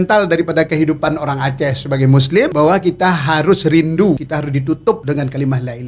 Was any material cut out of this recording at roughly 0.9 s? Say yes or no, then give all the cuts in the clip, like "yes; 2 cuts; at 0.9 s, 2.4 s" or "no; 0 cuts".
no; 2 cuts; at 2.5 s, 4.7 s